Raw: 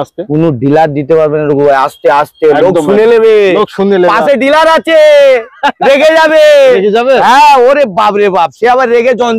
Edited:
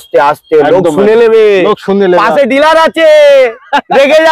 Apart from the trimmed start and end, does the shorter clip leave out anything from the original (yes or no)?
no